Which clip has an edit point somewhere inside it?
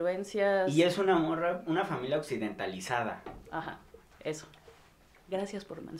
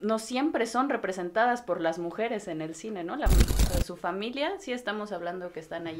second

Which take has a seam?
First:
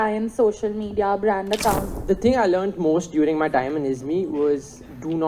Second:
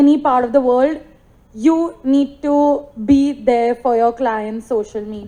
first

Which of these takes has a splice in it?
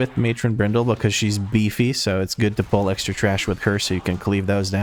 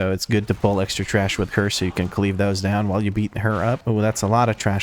second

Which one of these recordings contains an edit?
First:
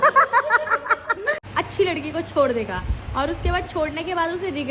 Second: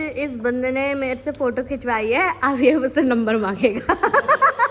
first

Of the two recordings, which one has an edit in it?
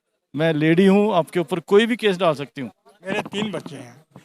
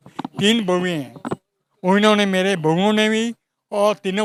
first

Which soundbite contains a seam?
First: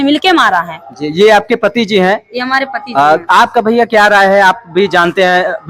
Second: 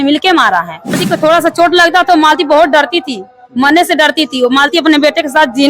second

